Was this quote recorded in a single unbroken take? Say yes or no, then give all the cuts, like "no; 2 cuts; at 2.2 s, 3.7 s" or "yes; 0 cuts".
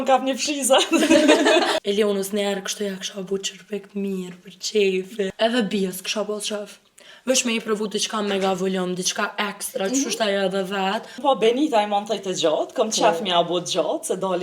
no; 3 cuts; at 1.7 s, 5.3 s, 11.2 s